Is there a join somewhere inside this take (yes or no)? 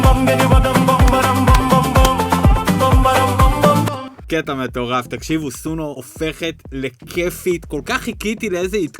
yes